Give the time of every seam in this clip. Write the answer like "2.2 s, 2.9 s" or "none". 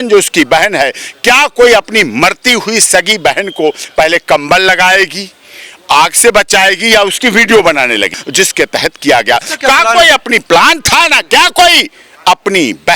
8.2 s

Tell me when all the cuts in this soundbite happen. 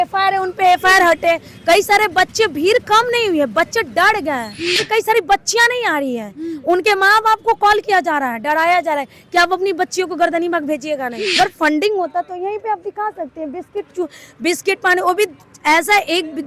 4.8 s, 11.4 s

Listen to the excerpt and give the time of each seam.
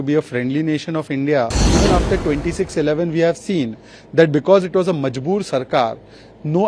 1.6 s

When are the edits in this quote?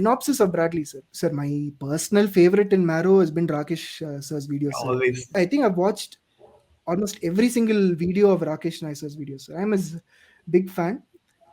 1.0 s, 5.3 s

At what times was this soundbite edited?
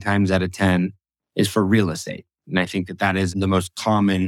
3.4 s

